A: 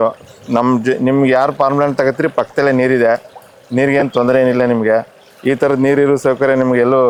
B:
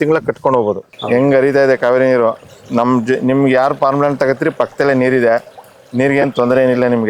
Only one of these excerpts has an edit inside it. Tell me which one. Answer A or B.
B